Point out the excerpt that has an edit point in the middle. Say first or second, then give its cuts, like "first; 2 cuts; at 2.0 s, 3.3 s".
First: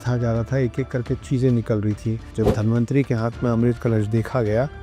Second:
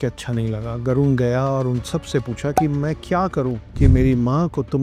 first; 1 cut; at 2.2 s